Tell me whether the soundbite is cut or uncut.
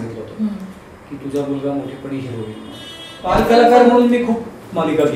cut